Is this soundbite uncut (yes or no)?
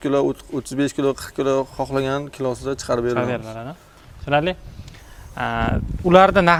yes